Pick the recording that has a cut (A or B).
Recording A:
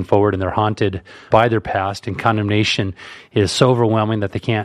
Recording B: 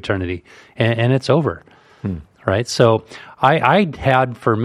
A